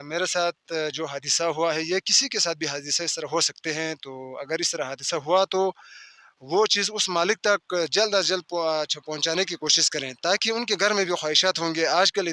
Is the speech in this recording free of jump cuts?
yes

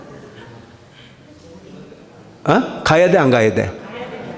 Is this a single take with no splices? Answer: yes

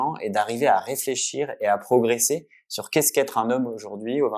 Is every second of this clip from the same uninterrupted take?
yes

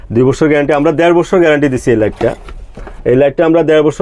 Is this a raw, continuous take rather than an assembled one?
yes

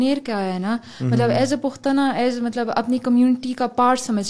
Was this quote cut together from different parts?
no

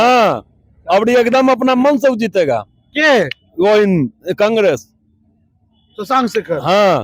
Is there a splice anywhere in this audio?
no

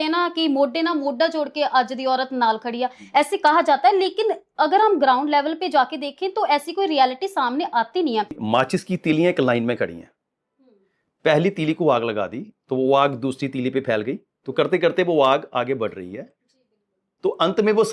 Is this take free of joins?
no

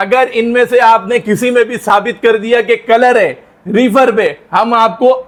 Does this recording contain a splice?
no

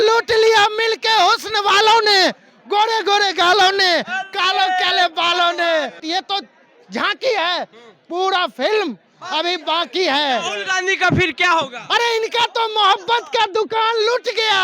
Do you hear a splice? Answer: yes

